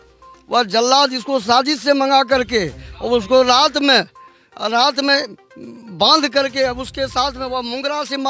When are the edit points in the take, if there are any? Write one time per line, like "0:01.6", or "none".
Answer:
none